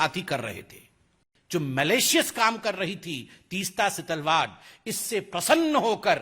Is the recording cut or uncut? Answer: cut